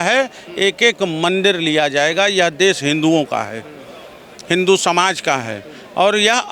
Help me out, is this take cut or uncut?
uncut